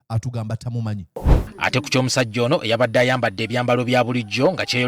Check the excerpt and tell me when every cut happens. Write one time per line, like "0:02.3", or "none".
0:01.4